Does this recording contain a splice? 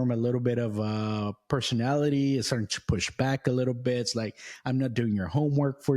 no; 0 cuts

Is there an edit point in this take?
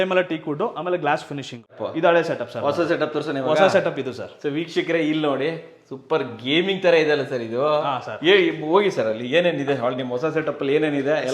yes; 1 cut; at 1.7 s

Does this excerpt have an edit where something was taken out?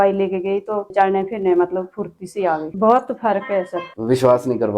yes; 2 cuts; at 2.7 s, 3.8 s

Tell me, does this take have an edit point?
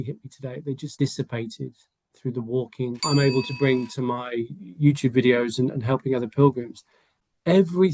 yes; 2 cuts; at 0.9 s, 3.0 s

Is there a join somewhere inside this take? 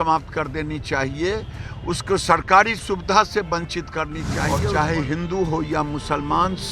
yes; 1 cut; at 4.6 s

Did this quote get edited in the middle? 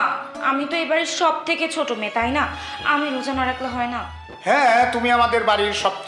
no; 0 cuts

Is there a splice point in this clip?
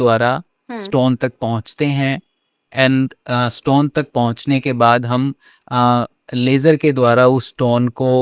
no; 0 cuts

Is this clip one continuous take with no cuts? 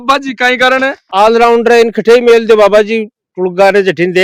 yes; 0 cuts

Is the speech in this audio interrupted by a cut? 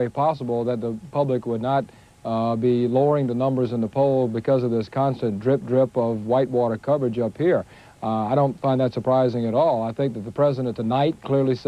no; 0 cuts

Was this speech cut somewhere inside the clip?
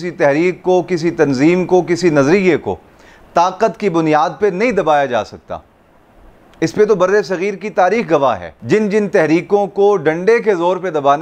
no; 0 cuts

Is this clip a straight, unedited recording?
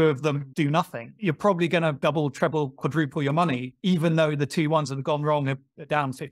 no; 1 cut; at 1.1 s

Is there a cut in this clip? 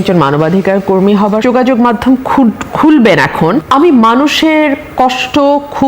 yes; 2 cuts; at 1.4 s, 3.6 s

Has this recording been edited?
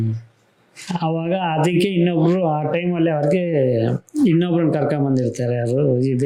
no; 0 cuts

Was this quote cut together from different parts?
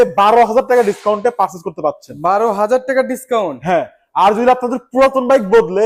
no; 0 cuts

